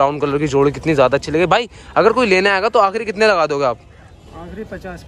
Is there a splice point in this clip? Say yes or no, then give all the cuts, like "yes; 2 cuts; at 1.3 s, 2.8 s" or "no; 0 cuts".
no; 0 cuts